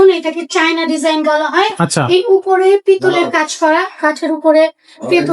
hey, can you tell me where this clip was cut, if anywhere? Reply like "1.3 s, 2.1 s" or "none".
none